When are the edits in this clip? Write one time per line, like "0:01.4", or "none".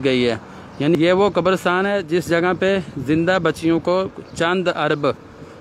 0:01.0

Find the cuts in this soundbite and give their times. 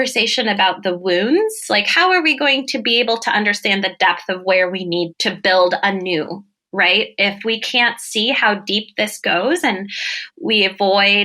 0:05.1
0:10.2

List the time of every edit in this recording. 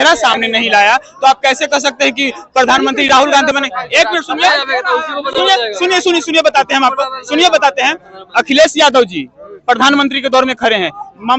none

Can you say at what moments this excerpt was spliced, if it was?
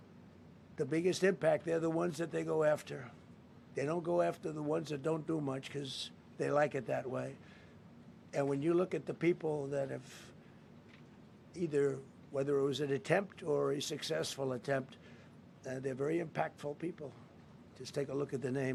none

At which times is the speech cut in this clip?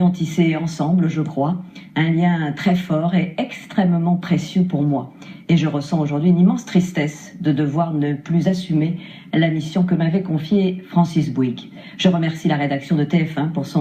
none

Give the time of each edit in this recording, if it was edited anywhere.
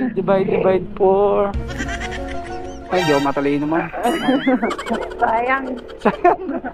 0:05.8

